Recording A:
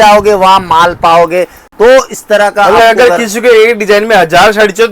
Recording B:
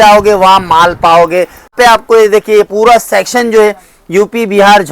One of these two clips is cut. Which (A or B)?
B